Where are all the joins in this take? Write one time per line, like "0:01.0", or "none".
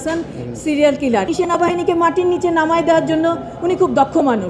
0:01.3